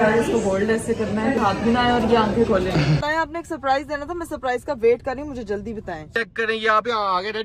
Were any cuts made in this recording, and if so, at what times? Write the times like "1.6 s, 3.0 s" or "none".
1.4 s, 3.0 s, 6.1 s